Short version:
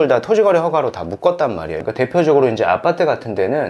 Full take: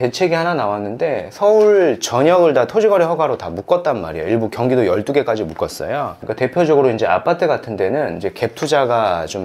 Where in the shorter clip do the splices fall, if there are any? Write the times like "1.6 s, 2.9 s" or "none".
1.7 s